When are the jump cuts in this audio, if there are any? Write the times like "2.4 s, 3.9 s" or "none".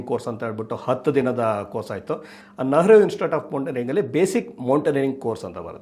2.4 s